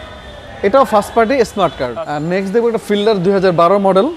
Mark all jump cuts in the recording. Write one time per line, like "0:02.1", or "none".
0:01.9